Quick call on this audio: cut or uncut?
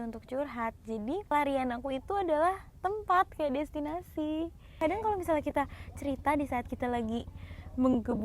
cut